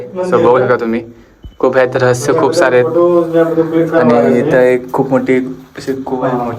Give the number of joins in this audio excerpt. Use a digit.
0